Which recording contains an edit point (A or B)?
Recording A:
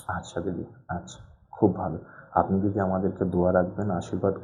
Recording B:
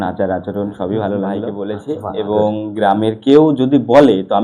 B